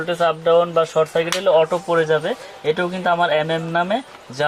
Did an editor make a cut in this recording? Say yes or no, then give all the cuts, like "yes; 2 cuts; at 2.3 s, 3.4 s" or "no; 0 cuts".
no; 0 cuts